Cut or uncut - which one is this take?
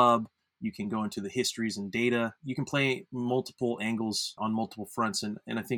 cut